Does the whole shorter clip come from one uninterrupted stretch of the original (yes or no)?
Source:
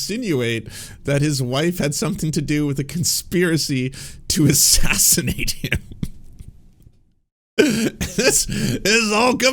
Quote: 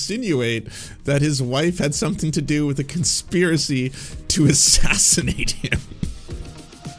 yes